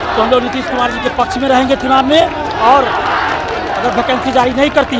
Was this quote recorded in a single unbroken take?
yes; 0 cuts

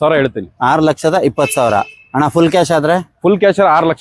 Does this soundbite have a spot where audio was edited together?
no; 0 cuts

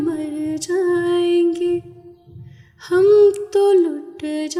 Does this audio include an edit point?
no; 0 cuts

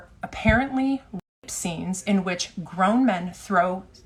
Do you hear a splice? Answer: no; 0 cuts

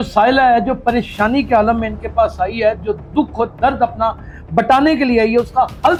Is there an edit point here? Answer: no; 0 cuts

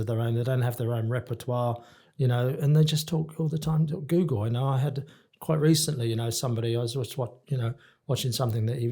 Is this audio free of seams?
yes; 0 cuts

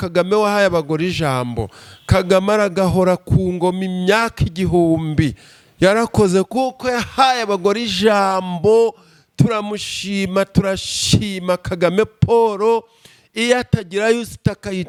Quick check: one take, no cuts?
yes; 0 cuts

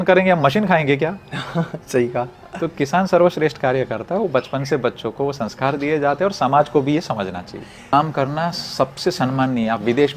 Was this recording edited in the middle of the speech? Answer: yes; 1 cut; at 7.9 s

